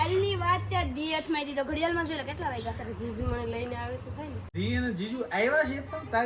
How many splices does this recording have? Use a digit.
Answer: 1